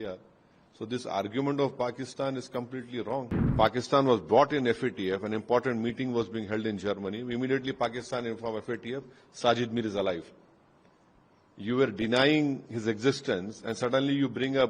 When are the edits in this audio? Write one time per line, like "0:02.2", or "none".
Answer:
0:03.4